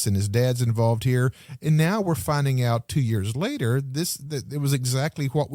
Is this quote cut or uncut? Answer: uncut